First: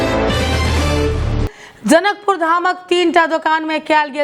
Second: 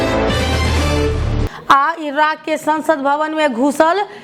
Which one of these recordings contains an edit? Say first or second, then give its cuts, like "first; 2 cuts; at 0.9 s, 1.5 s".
first; 1 cut; at 1.4 s